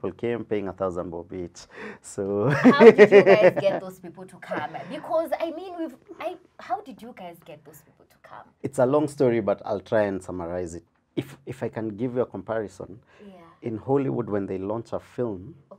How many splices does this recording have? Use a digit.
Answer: 1